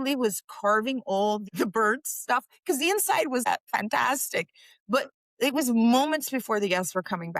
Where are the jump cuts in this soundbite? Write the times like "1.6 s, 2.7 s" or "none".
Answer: 3.4 s